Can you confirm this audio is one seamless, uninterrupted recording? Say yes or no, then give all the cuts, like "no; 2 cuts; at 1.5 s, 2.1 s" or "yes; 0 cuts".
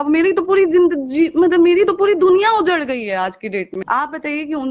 no; 1 cut; at 3.7 s